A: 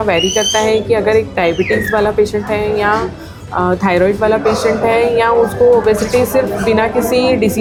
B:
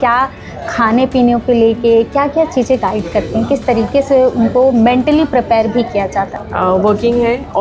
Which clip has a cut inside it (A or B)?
B